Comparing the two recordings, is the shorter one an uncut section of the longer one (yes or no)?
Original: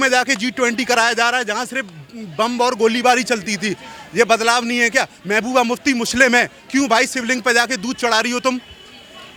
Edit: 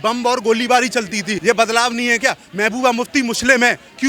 no